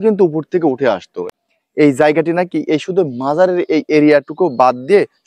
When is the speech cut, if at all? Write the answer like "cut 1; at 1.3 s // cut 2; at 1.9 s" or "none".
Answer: cut 1; at 1.3 s